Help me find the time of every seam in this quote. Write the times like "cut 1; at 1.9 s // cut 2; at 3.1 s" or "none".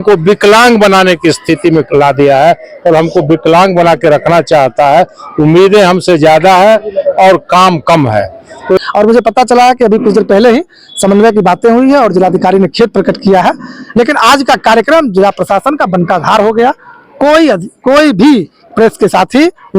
cut 1; at 8.8 s